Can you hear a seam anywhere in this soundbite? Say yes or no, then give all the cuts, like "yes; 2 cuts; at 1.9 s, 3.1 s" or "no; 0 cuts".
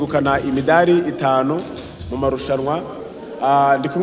no; 0 cuts